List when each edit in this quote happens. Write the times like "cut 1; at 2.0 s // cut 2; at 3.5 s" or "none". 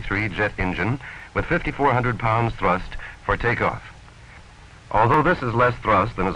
cut 1; at 2.5 s